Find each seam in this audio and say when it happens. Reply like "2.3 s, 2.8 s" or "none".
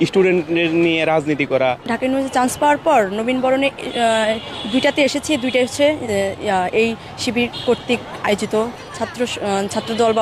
1.8 s, 8.8 s